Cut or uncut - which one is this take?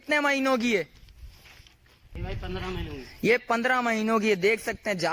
cut